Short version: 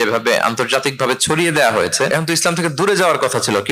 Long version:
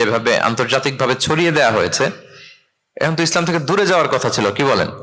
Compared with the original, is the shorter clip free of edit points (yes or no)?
no